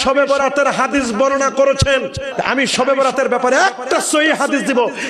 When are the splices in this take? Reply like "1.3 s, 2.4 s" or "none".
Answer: 2.3 s